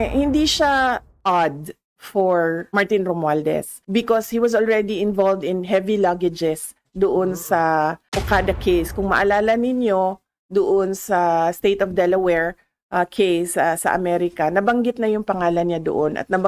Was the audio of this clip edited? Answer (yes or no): yes